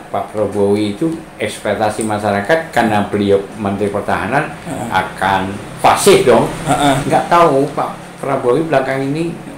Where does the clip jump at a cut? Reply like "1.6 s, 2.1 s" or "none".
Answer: 7.0 s